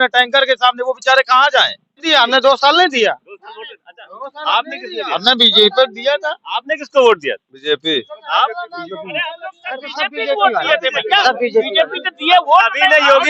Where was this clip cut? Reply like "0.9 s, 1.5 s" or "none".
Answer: 2.0 s